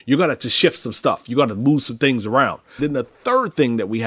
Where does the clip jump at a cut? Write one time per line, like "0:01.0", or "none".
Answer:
0:02.7